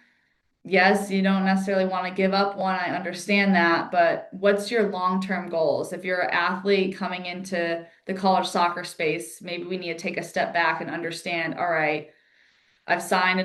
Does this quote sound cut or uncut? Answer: uncut